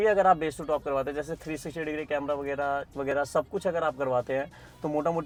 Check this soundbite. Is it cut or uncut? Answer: uncut